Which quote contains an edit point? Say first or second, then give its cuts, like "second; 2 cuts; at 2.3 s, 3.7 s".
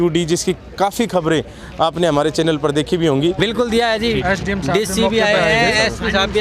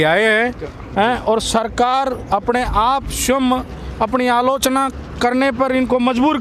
first; 1 cut; at 3.4 s